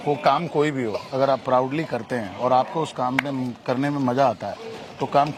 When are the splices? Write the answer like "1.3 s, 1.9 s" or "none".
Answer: none